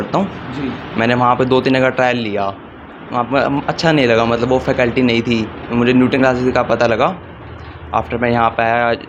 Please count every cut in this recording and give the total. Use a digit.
0